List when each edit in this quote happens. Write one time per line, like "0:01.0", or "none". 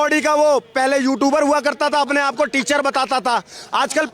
none